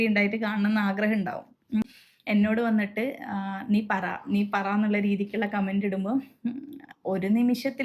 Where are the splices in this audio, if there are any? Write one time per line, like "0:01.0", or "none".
0:01.8

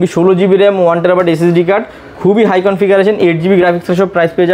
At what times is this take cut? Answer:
none

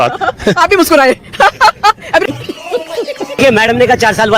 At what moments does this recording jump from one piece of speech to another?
0:03.4

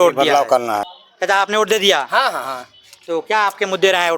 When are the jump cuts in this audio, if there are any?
0:01.0

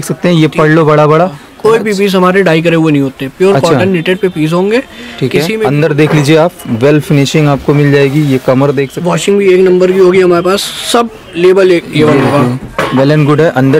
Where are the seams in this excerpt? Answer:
0:01.5
0:05.6
0:08.9

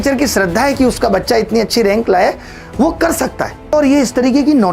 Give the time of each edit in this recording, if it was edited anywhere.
0:03.7

